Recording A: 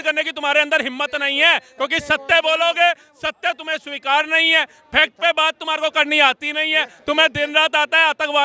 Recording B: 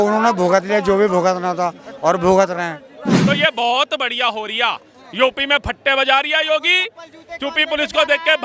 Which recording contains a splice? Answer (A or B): B